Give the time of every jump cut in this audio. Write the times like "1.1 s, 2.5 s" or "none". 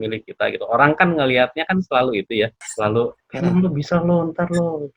2.6 s